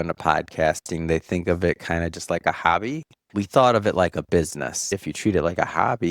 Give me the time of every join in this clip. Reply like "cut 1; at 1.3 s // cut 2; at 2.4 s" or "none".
cut 1; at 5.0 s

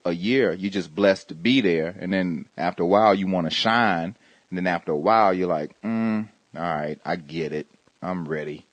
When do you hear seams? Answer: cut 1; at 3.1 s

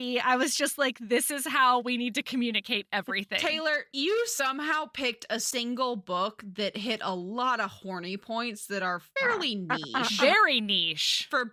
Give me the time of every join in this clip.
none

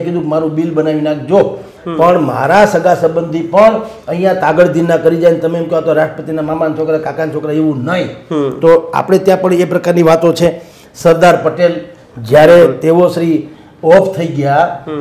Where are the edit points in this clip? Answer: none

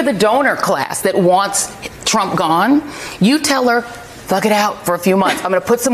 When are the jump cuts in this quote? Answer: none

